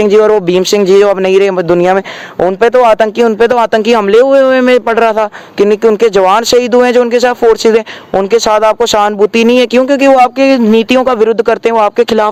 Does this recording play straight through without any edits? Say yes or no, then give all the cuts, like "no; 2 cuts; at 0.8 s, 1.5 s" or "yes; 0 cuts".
yes; 0 cuts